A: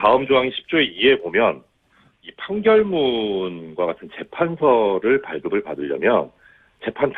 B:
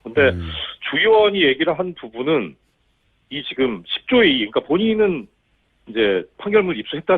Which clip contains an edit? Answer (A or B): B